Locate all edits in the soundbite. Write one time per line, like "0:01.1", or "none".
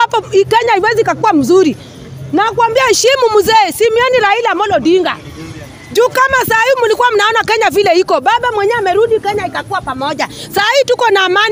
none